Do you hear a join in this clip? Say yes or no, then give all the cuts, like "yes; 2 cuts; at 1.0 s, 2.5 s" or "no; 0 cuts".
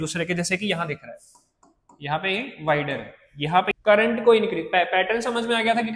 yes; 1 cut; at 3.7 s